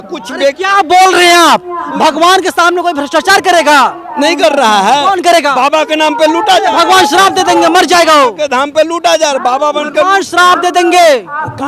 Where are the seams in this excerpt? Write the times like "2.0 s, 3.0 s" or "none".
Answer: none